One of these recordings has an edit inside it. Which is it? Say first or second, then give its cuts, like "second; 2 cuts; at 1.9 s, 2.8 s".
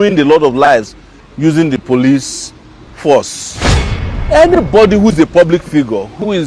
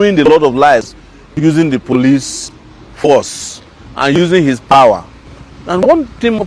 first; 1 cut; at 3.9 s